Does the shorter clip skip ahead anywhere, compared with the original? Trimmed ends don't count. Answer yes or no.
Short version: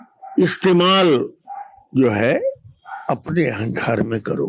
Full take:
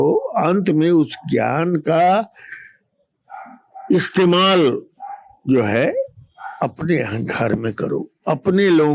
no